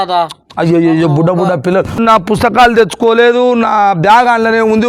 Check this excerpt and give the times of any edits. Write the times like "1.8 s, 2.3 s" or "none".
2.0 s